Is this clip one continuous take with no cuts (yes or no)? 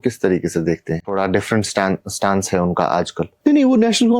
no